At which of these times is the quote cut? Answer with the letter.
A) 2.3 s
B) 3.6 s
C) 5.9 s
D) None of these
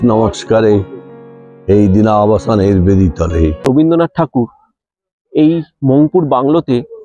B